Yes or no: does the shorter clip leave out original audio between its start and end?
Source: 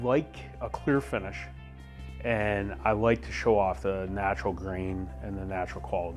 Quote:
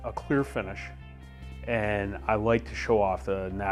no